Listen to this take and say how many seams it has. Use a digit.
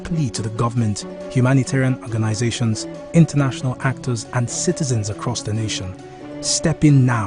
1